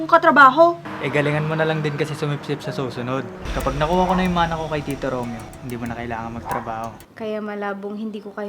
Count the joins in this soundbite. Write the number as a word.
four